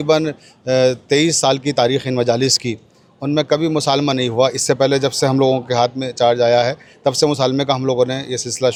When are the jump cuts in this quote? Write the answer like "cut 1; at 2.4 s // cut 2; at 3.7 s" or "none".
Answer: none